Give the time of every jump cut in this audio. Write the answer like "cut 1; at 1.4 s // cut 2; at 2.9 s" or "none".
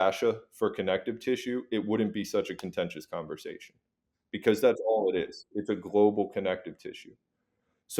none